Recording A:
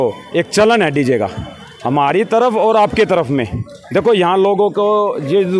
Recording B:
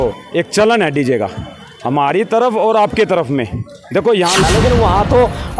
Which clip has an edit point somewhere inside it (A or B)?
B